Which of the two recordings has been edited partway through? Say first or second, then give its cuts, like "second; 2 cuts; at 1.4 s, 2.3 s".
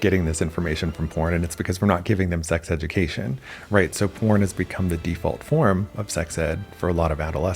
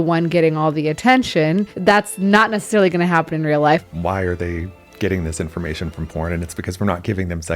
second; 1 cut; at 3.8 s